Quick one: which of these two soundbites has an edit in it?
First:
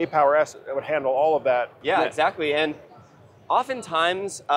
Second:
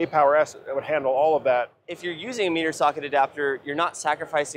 second; 1 cut; at 1.8 s

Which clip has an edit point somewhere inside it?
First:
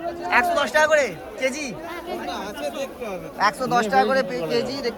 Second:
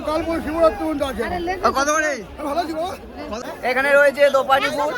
second; 1 cut; at 3.4 s

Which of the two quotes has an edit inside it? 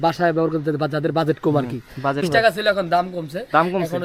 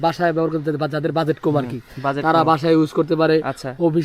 first; 1 cut; at 2.2 s

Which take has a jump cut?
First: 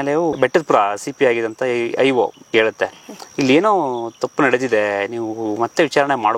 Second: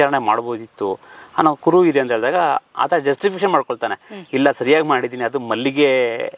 first; 1 cut; at 2.5 s

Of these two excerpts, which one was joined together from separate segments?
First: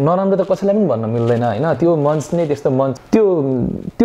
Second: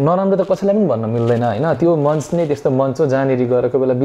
first; 1 cut; at 2.9 s

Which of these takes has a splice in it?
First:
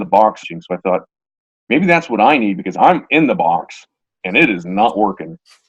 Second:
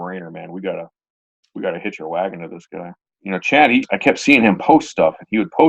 second; 1 cut; at 3.0 s

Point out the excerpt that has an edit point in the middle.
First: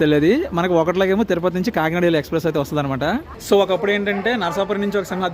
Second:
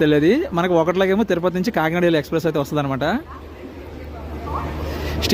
first; 1 cut; at 3.3 s

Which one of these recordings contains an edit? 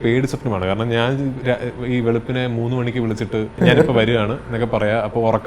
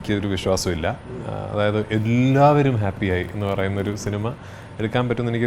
first; 1 cut; at 3.6 s

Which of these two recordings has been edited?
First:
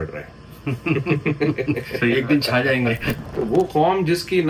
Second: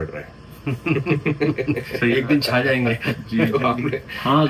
first; 1 cut; at 3.1 s

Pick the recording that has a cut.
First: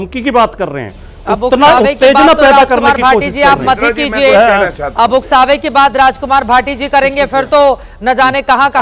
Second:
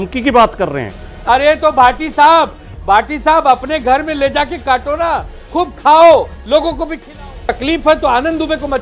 second; 2 cuts; at 1.1 s, 7.6 s

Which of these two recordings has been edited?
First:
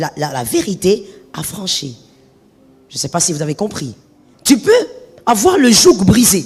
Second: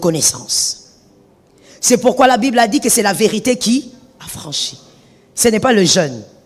first; 1 cut; at 4.0 s

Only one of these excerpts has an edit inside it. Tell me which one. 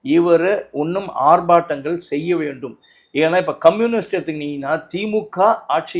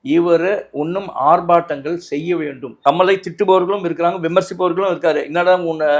second; 1 cut; at 2.7 s

